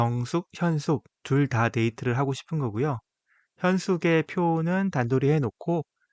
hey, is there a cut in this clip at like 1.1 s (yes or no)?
yes